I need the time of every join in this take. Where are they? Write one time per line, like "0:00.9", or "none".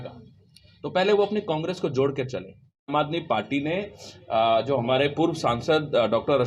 0:02.9